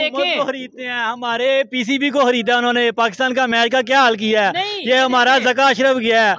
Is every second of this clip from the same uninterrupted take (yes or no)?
yes